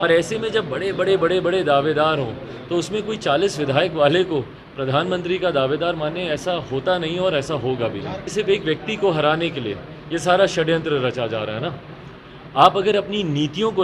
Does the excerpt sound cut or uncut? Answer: cut